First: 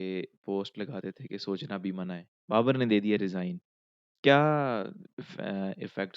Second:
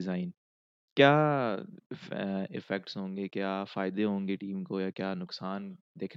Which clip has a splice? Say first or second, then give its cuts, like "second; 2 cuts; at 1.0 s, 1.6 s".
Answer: first; 1 cut; at 2.3 s